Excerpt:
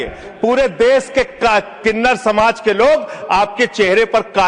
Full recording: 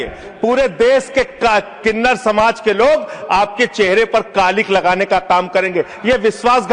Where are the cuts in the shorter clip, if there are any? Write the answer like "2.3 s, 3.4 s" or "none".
none

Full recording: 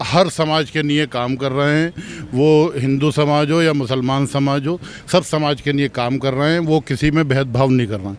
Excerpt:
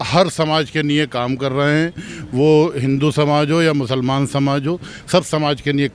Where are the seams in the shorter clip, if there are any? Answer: none

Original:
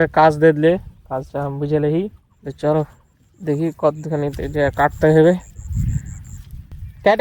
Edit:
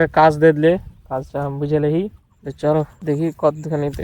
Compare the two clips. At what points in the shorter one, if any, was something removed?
3.0 s

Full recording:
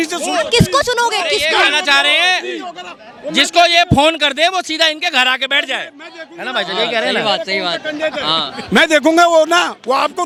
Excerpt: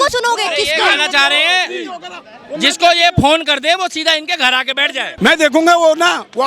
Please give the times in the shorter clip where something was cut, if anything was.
5.1 s

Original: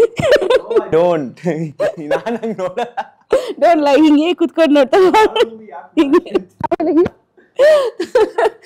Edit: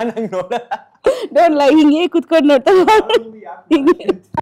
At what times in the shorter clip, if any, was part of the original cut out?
none

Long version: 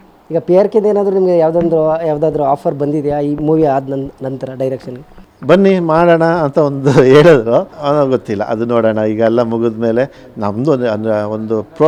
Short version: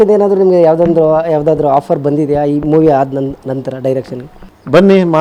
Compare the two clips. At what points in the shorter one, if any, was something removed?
none

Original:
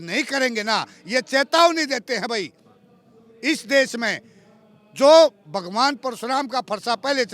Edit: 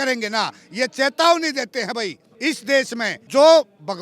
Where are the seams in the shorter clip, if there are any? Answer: 2.3 s, 3.2 s

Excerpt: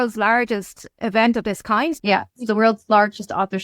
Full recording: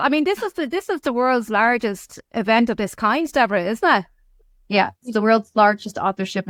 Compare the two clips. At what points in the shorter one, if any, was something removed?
2.0 s

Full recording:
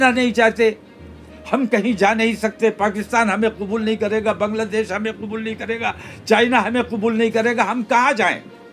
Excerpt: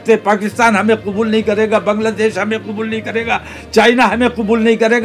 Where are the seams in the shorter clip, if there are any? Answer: none

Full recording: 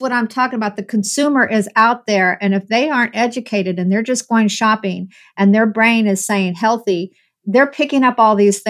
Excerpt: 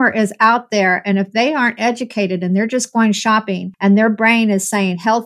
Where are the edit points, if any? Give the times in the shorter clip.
3.6 s

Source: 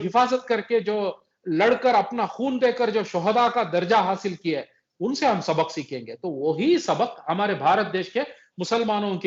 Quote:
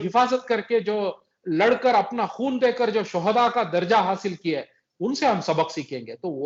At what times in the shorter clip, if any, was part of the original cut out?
none

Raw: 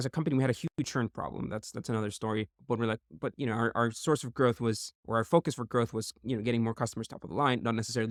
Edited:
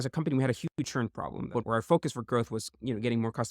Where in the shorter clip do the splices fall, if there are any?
1.5 s

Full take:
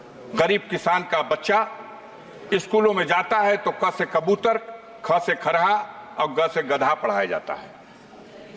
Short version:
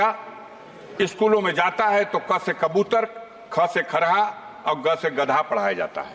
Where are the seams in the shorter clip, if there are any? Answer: none

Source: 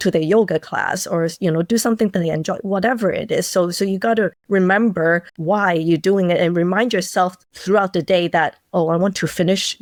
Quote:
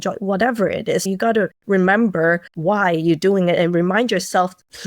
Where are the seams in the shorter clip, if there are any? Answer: 1.1 s

